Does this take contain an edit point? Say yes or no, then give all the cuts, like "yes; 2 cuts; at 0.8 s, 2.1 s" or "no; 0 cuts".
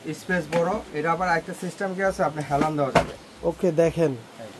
no; 0 cuts